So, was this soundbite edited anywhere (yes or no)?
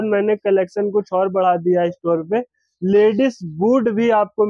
no